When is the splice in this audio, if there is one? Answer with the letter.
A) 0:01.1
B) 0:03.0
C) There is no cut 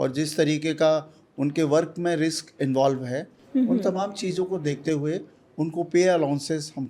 C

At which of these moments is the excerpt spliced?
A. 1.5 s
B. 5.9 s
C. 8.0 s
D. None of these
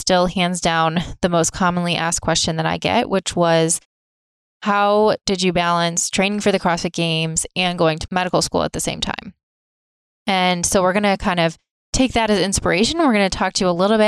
C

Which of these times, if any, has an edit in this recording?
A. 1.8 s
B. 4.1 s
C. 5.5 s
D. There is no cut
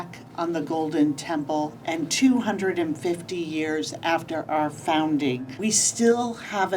C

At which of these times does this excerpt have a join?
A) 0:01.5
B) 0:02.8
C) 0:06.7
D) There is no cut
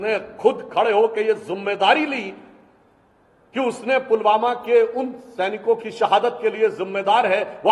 D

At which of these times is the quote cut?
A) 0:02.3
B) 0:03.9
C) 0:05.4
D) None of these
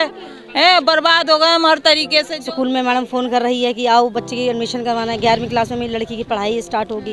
A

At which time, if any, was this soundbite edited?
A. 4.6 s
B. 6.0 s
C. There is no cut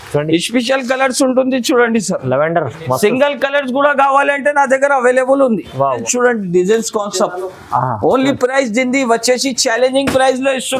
B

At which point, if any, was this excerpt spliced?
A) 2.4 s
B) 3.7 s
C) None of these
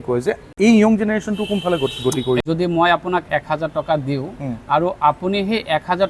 A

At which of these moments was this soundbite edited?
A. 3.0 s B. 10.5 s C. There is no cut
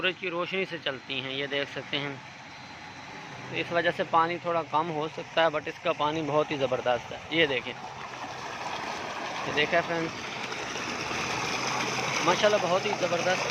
C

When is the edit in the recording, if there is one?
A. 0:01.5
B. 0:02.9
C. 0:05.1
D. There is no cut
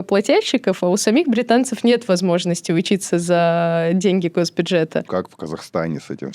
C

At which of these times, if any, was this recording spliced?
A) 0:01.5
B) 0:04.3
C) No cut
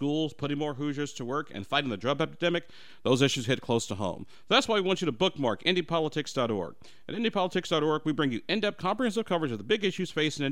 C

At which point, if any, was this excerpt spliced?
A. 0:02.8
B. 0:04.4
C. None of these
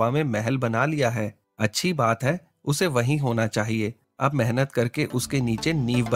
C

